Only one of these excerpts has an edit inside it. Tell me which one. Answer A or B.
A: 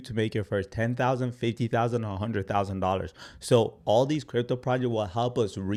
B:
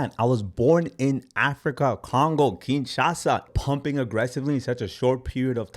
B